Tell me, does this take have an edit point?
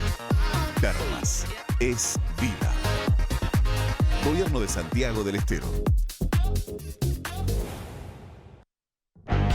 yes; 1 cut; at 8.6 s

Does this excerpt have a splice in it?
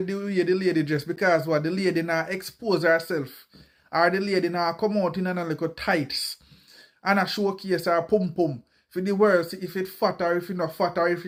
no; 0 cuts

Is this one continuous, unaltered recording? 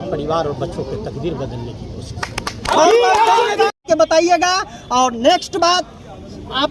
no; 1 cut; at 3.8 s

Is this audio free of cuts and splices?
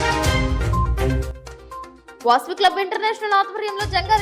no; 1 cut; at 2.0 s

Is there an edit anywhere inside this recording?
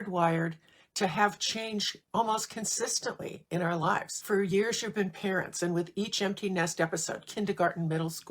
yes; 1 cut; at 4.1 s

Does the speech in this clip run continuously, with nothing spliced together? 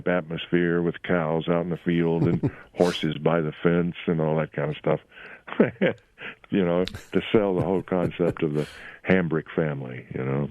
yes; 0 cuts

